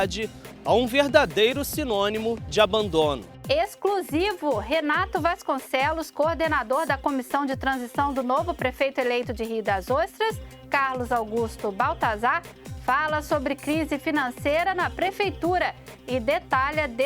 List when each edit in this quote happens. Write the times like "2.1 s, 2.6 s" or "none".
3.3 s